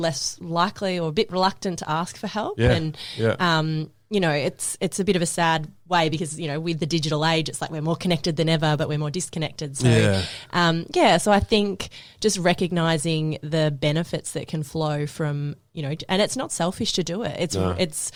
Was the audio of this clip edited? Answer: no; 0 cuts

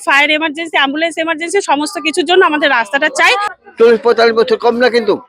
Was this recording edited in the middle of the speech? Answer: yes; 1 cut; at 3.5 s

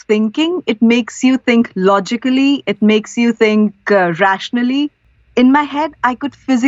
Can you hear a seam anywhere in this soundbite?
yes; 1 cut; at 5.0 s

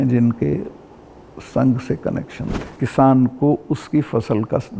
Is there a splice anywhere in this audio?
yes; 1 cut; at 2.8 s

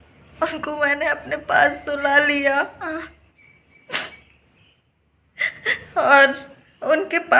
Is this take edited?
no; 0 cuts

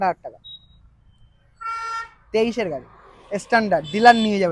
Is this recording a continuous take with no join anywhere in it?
yes; 0 cuts

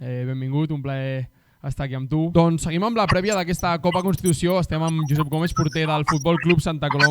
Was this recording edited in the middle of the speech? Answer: yes; 1 cut; at 2.3 s

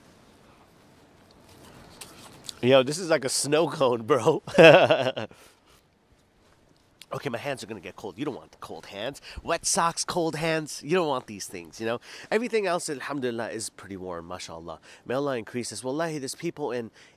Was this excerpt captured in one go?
yes; 0 cuts

